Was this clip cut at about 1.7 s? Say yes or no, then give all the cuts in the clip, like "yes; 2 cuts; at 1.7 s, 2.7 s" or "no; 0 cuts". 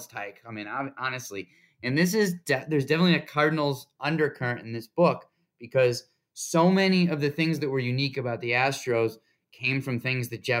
no; 0 cuts